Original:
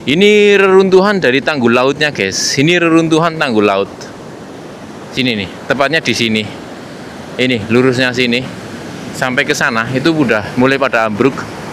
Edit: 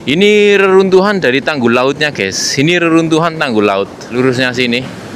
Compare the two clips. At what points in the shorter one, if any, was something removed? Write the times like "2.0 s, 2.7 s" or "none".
4.1 s